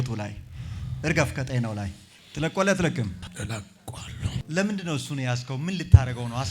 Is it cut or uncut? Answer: cut